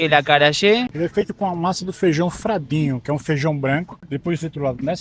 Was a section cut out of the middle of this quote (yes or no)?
yes